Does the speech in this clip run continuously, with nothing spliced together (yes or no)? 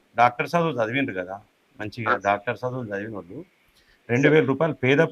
yes